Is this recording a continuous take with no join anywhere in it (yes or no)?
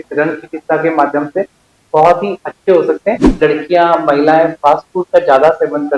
no